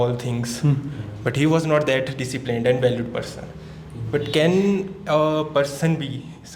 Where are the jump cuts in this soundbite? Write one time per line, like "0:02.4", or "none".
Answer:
none